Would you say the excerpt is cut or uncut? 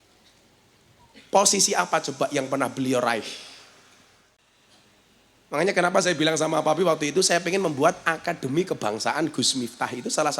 cut